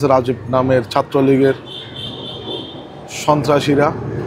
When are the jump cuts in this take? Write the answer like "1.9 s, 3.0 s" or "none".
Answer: none

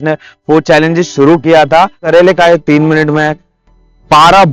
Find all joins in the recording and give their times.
2.0 s

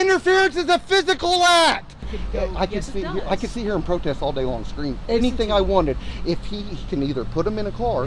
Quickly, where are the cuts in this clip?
2.1 s

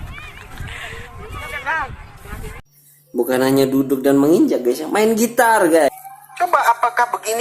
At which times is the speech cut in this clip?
5.9 s

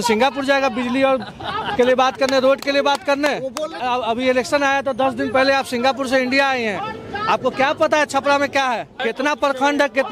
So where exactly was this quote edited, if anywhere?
3.7 s, 8.9 s

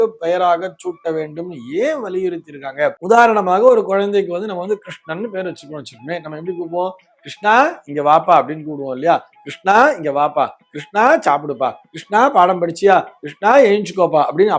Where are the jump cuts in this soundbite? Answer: 3.0 s

